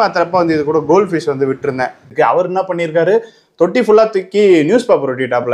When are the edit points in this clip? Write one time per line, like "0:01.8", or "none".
0:02.1